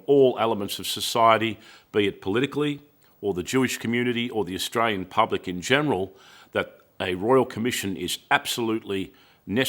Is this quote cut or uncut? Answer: uncut